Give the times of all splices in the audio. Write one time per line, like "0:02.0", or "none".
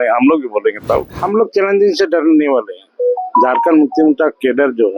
0:01.1